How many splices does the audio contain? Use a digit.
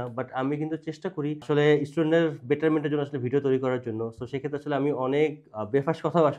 0